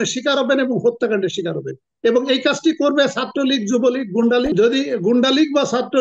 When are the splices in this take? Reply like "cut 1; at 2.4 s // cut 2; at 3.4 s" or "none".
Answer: cut 1; at 4.5 s

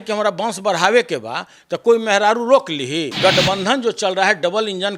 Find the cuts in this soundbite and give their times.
cut 1; at 3.1 s

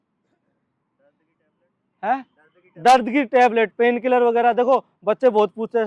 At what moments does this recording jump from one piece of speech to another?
none

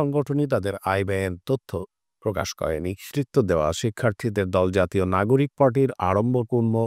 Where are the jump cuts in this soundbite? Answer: cut 1; at 3.1 s

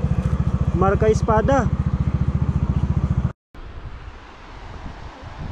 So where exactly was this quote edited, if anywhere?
cut 1; at 3.3 s

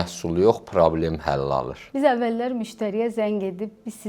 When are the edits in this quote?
cut 1; at 1.8 s

